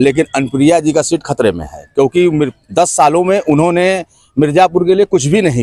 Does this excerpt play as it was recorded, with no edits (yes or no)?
yes